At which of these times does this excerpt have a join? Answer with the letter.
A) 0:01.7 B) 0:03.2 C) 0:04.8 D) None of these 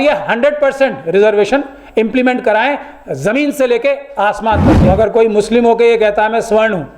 C